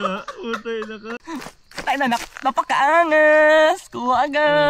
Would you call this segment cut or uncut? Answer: cut